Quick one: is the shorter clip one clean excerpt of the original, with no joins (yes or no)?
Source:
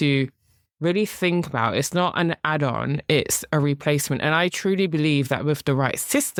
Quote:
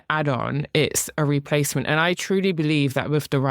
yes